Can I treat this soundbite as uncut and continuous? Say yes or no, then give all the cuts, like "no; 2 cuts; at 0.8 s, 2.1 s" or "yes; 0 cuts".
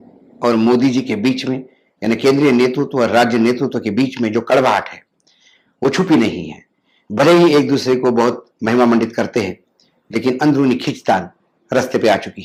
yes; 0 cuts